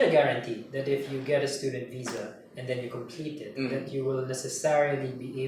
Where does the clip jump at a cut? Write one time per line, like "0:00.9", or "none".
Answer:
none